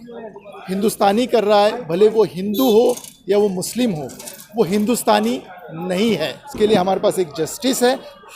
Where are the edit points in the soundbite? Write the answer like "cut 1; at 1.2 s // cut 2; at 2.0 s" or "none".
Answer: cut 1; at 6.4 s